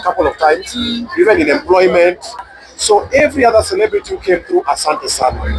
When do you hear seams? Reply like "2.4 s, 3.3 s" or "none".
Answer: 2.5 s